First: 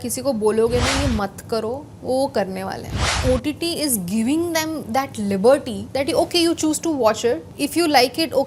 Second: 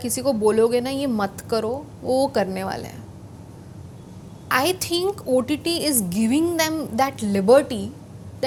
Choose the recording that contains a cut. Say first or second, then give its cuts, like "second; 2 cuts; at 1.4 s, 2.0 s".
first; 3 cuts; at 3.2 s, 5.8 s, 7.5 s